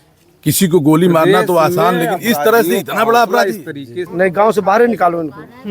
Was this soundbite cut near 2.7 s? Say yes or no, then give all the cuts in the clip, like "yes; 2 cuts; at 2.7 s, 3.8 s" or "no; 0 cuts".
no; 1 cut; at 4.0 s